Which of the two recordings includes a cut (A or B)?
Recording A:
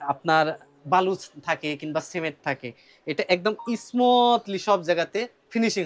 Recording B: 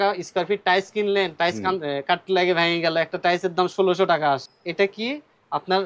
B